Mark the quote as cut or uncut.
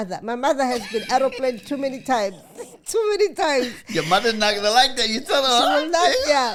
uncut